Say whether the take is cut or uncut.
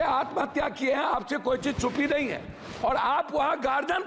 uncut